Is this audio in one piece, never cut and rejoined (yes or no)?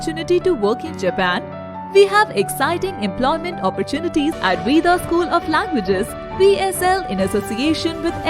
no